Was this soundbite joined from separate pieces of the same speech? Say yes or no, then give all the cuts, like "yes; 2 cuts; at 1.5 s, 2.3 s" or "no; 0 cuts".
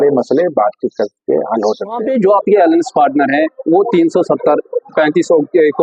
yes; 1 cut; at 2.0 s